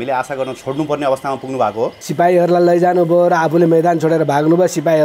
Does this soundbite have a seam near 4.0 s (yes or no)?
no